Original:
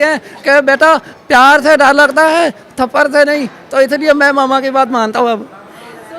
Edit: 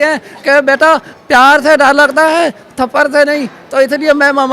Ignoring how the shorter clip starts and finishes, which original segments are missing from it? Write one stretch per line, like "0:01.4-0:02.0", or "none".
none